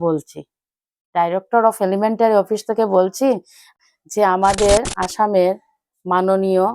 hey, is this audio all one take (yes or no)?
no